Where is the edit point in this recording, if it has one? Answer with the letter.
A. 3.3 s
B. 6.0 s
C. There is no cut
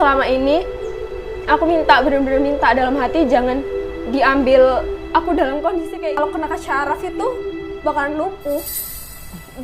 B